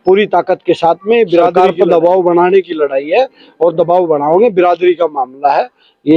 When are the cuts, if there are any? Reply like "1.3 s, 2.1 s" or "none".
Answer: 1.5 s

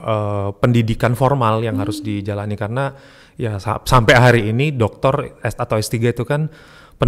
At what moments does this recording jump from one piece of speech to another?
none

